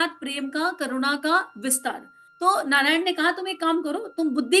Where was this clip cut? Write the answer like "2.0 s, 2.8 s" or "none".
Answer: 2.2 s